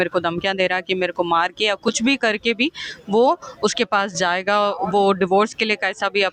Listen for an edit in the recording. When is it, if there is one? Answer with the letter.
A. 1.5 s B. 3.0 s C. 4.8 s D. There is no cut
D